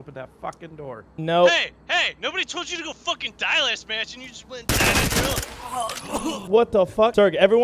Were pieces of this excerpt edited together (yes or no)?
no